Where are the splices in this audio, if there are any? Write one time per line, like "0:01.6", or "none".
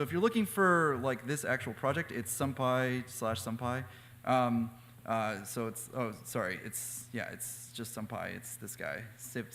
0:08.2